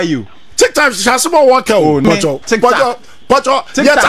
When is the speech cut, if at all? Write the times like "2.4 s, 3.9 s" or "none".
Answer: 2.0 s